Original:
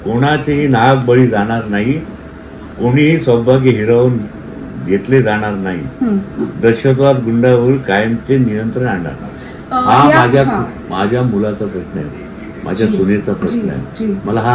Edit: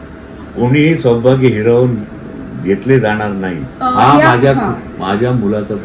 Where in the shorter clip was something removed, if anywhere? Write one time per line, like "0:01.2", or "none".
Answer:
0:03.6